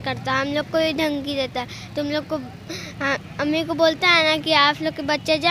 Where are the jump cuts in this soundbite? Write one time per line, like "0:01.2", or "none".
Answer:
none